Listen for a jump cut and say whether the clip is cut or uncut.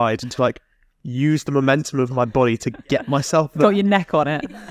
uncut